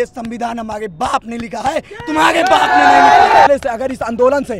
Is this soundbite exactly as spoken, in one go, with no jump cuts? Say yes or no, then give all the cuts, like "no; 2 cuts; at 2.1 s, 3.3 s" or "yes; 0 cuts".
no; 1 cut; at 3.5 s